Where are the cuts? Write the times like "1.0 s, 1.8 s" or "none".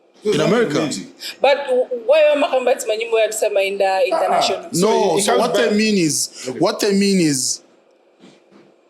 none